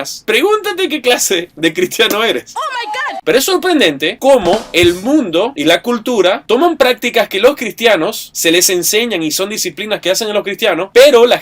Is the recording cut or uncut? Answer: cut